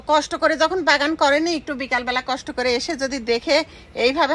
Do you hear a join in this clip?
no; 0 cuts

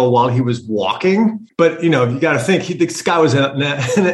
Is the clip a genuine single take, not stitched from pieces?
no; 1 cut; at 1.4 s

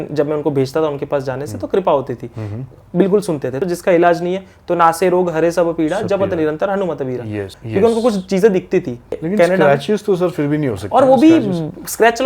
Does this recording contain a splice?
yes; 3 cuts; at 3.6 s, 7.5 s, 9.2 s

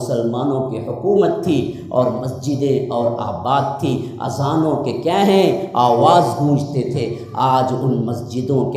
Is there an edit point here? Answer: no; 0 cuts

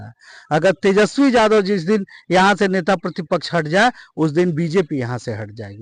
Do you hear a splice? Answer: no; 0 cuts

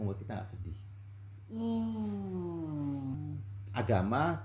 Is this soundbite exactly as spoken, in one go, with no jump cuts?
no; 1 cut; at 3.2 s

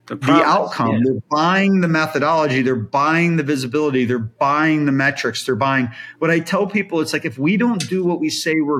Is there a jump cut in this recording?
no; 0 cuts

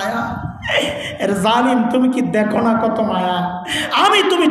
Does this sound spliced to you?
no; 0 cuts

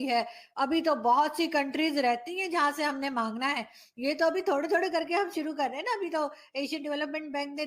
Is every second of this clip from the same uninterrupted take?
yes; 0 cuts

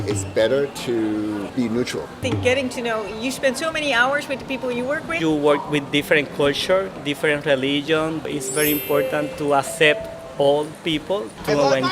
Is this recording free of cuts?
no; 2 cuts; at 2.2 s, 5.1 s

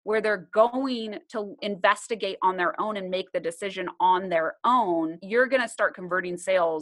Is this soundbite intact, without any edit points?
no; 2 cuts; at 1.6 s, 5.2 s

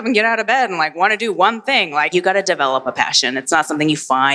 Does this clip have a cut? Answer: yes; 1 cut; at 2.1 s

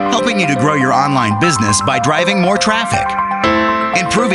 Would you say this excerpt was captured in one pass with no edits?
yes; 0 cuts

